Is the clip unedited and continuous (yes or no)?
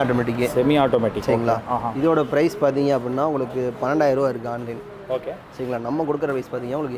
yes